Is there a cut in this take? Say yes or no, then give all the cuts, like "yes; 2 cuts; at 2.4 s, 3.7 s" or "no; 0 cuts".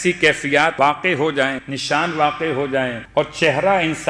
yes; 3 cuts; at 0.7 s, 1.7 s, 3.0 s